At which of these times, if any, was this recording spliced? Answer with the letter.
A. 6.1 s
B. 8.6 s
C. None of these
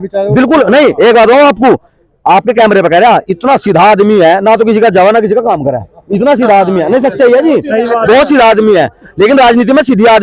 C